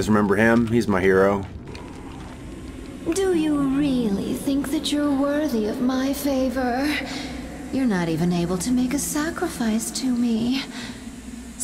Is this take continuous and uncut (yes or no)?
no